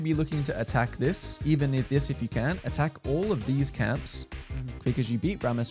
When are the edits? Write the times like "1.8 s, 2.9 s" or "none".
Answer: none